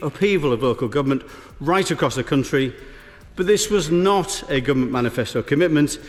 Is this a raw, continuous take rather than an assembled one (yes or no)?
yes